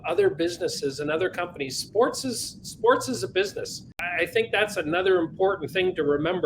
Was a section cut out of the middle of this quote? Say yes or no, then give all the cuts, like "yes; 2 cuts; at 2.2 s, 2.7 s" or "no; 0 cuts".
yes; 1 cut; at 4.0 s